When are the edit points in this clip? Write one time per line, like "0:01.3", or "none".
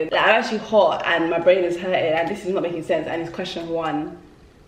none